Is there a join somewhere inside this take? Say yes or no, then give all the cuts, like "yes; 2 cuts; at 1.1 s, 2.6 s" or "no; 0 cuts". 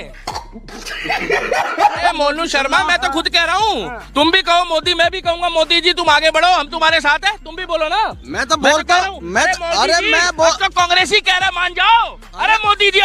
yes; 1 cut; at 2.1 s